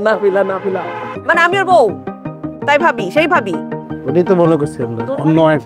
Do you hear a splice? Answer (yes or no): yes